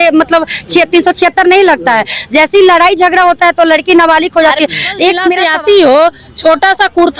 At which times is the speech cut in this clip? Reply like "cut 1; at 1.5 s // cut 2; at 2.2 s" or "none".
cut 1; at 5.4 s